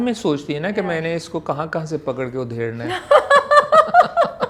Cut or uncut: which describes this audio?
uncut